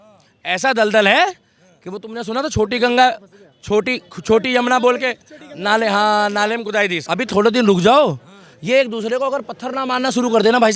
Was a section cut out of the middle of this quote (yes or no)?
yes